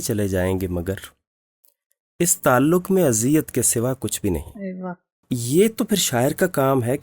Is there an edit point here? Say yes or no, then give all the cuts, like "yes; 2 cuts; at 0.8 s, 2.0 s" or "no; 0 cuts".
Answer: yes; 1 cut; at 5.3 s